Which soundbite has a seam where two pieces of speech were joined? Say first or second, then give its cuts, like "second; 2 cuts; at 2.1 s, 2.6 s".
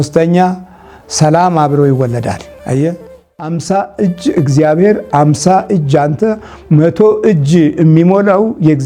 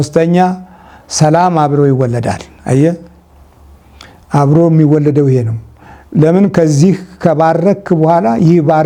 first; 1 cut; at 3.5 s